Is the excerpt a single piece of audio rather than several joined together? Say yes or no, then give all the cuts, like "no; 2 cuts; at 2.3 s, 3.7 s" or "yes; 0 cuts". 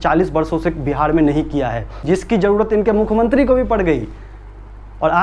no; 1 cut; at 2.0 s